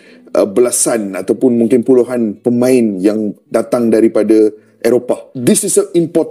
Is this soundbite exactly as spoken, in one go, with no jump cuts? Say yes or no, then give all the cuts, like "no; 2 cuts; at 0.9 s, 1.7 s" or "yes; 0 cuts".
no; 1 cut; at 5.3 s